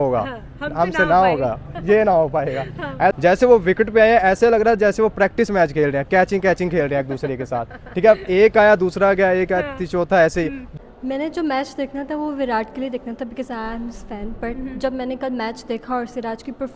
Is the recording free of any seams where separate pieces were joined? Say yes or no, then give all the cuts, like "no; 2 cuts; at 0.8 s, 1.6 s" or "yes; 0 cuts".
no; 2 cuts; at 3.1 s, 10.7 s